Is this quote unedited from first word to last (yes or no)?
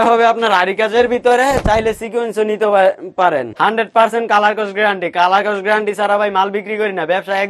no